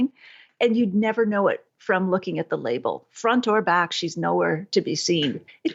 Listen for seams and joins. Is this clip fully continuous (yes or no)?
yes